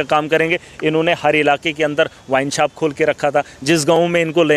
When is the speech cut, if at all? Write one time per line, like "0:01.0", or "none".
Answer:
none